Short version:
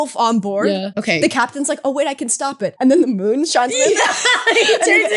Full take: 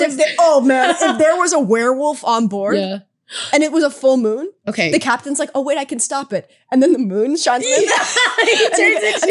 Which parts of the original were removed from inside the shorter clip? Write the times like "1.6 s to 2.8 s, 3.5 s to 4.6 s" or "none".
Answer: 3.0 s to 4.6 s, 6.4 s to 6.7 s